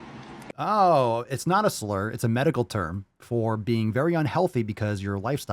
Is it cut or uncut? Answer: uncut